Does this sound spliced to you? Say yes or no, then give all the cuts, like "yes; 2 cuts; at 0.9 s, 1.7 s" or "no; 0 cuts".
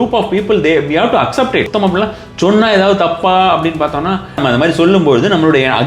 yes; 2 cuts; at 1.7 s, 4.4 s